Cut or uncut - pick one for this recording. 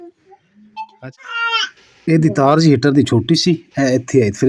uncut